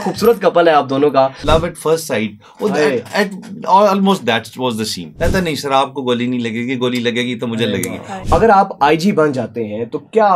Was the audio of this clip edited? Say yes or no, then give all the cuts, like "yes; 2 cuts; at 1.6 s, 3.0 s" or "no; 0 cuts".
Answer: yes; 3 cuts; at 1.4 s, 5.0 s, 8.2 s